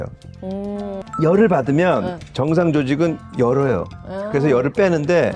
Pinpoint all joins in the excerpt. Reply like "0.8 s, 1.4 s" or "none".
0.9 s

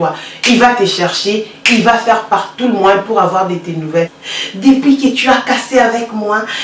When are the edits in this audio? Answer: 4.2 s

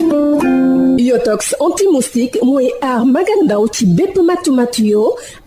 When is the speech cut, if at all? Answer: 0.9 s

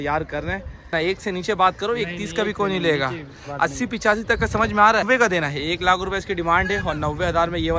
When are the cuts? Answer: 0.9 s, 5.0 s

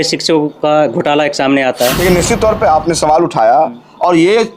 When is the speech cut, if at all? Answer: 1.9 s

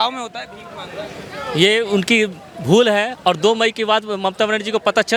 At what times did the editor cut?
none

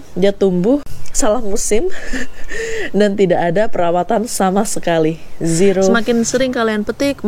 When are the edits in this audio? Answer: 1.0 s, 5.9 s

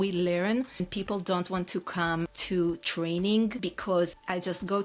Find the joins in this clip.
0.9 s, 2.4 s, 3.9 s

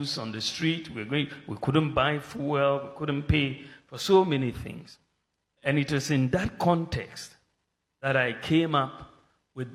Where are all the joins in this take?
none

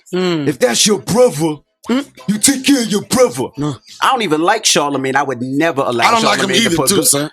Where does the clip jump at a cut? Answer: 3.8 s

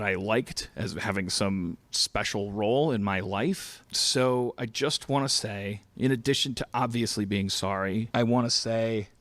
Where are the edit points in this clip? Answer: 3.7 s, 8.1 s

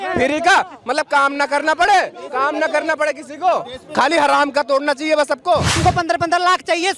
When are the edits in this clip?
5.7 s

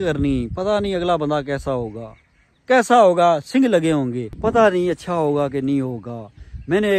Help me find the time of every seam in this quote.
none

